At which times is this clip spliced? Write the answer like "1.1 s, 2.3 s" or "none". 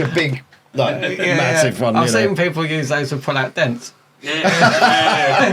none